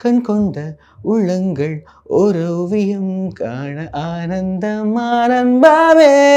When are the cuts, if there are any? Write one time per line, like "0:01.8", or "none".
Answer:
none